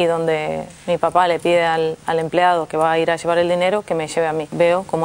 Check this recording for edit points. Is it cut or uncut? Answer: uncut